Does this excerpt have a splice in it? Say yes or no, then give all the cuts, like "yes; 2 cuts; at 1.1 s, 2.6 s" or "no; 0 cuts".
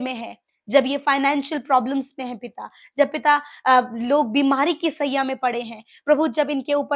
no; 0 cuts